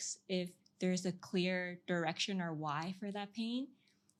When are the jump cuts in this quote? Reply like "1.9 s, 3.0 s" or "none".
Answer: none